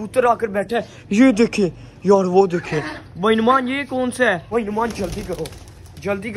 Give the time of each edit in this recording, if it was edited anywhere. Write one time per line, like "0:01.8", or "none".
0:04.4

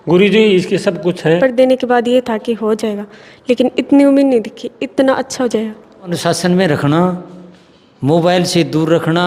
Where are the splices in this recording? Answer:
0:01.4
0:06.2

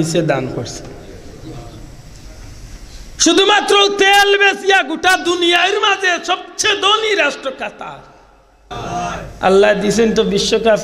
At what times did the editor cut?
0:08.7

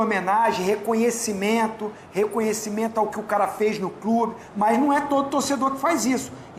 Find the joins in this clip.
0:04.4

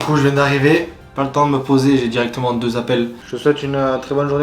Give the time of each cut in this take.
0:01.1
0:03.2

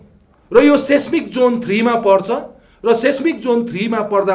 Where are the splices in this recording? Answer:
none

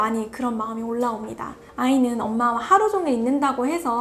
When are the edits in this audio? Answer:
0:01.4

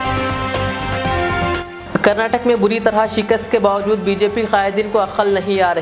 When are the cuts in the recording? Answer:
0:01.7

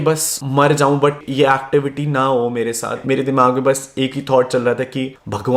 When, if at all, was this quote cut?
0:03.0

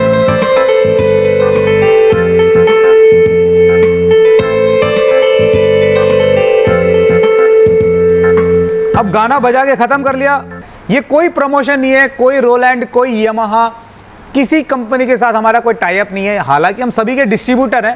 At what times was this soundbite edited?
0:10.7

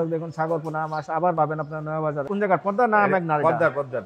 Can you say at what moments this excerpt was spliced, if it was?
0:02.3

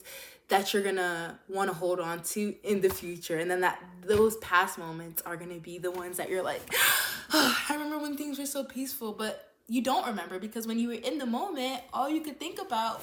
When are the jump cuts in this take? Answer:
none

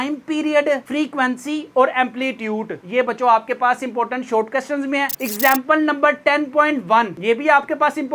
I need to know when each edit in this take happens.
none

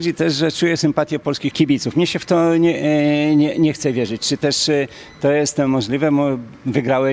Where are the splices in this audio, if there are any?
0:01.5

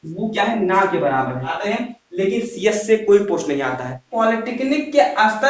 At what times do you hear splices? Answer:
0:01.5
0:04.1

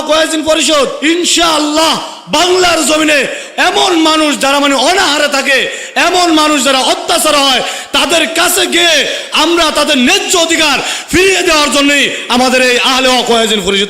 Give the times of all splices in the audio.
0:01.0
0:03.4

